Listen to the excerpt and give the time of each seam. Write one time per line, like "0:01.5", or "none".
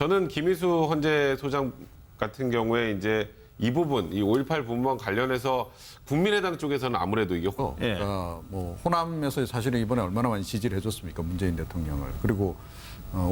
none